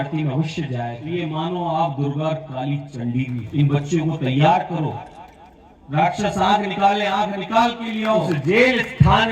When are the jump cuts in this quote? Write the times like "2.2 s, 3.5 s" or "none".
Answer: 1.0 s, 3.4 s, 8.3 s